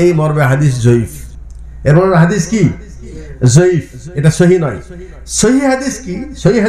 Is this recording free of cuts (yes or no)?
yes